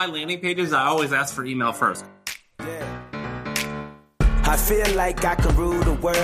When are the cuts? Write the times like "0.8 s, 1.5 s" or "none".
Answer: 2.0 s